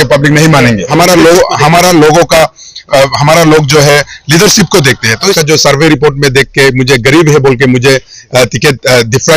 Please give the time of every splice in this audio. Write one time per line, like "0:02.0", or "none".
0:00.9
0:05.4